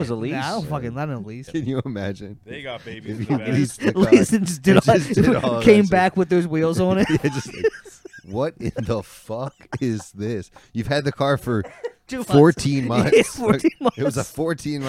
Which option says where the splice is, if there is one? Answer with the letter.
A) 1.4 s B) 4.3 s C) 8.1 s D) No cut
A